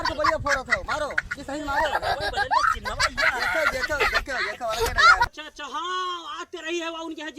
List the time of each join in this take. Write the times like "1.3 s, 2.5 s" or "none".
5.3 s